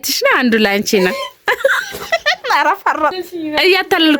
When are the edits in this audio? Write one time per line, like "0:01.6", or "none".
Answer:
0:03.3